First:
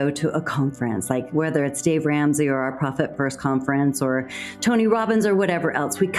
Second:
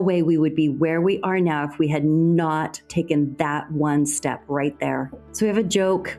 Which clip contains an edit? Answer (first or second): second